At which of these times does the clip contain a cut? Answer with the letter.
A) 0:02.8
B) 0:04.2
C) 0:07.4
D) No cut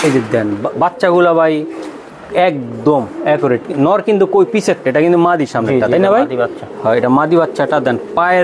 D